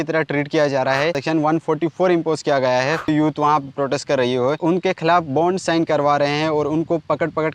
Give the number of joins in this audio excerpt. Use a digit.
0